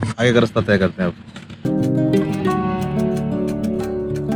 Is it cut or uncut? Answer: uncut